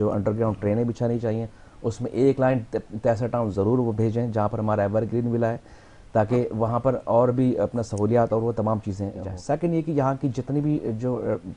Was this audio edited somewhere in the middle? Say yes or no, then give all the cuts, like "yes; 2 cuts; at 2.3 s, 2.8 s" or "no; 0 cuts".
yes; 1 cut; at 9.3 s